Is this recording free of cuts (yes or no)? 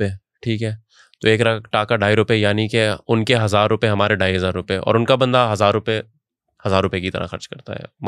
yes